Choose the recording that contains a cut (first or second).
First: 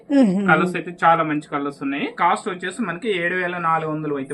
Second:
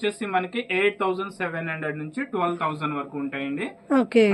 first